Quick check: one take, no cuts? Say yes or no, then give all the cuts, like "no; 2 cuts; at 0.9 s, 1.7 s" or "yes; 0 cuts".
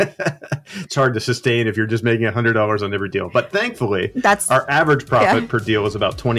yes; 0 cuts